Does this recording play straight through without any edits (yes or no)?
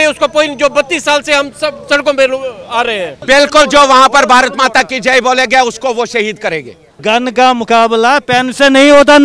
no